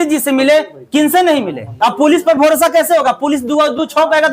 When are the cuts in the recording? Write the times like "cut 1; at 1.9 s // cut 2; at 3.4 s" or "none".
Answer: cut 1; at 1.6 s